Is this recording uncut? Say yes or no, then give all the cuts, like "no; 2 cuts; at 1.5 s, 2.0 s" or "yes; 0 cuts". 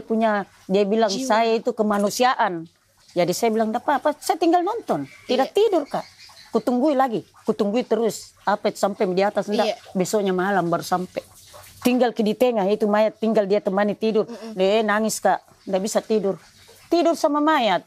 yes; 0 cuts